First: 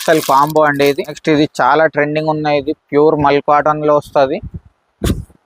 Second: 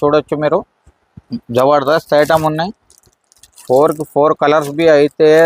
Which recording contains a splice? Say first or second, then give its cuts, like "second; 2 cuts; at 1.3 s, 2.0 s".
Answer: first; 1 cut; at 1.2 s